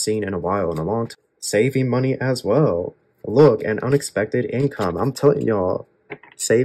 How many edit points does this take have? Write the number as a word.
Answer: one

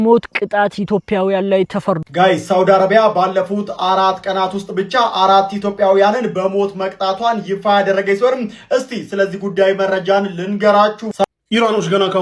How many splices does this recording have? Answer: two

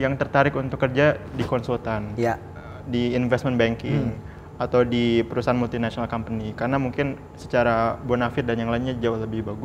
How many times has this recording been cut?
zero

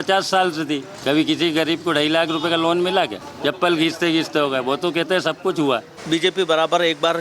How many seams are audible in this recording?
three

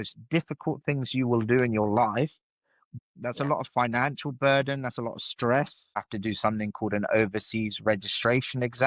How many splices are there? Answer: two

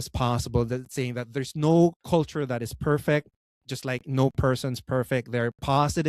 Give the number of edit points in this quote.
one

